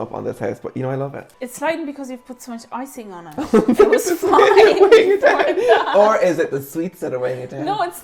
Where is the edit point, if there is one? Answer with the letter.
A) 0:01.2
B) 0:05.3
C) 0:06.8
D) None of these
A